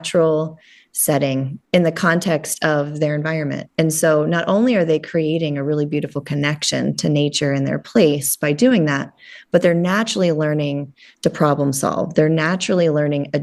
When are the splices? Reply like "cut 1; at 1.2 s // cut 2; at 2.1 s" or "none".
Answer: none